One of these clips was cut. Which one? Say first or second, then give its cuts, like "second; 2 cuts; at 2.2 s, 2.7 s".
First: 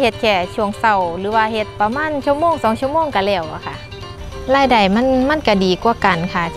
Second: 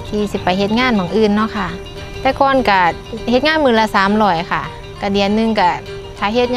first; 2 cuts; at 1.7 s, 4.1 s